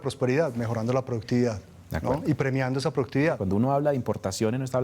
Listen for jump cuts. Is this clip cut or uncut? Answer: cut